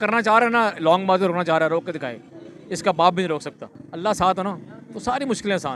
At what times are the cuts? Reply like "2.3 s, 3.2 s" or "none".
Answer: none